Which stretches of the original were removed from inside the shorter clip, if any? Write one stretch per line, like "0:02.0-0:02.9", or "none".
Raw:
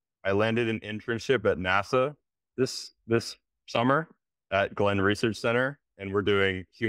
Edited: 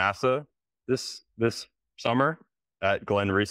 none